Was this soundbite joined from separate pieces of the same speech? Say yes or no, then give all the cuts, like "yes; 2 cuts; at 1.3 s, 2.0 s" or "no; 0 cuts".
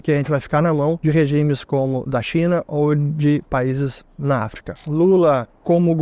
yes; 2 cuts; at 1.0 s, 4.8 s